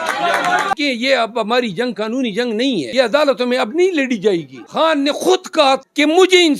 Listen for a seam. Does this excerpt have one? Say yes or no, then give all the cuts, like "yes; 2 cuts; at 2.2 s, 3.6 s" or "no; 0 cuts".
yes; 4 cuts; at 0.7 s, 2.9 s, 4.6 s, 5.8 s